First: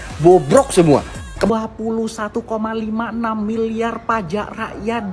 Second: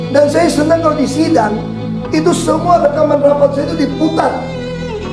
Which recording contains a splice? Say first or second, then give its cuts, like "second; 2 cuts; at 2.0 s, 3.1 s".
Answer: first; 1 cut; at 1.5 s